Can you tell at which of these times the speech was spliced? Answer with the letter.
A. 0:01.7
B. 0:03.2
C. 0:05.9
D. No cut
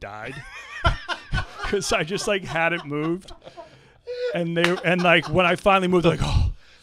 D